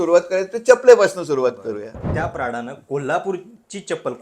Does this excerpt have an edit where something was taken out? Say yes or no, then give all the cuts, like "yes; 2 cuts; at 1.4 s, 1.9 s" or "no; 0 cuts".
yes; 1 cut; at 2.0 s